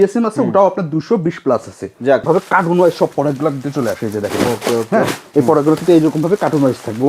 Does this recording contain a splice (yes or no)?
yes